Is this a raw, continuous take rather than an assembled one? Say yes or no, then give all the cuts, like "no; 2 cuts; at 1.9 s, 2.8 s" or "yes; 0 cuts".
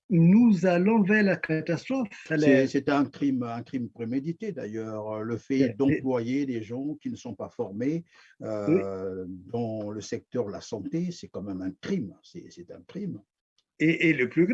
no; 1 cut; at 2.3 s